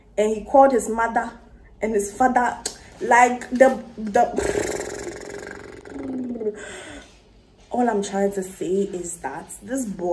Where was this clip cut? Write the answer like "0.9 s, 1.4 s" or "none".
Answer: none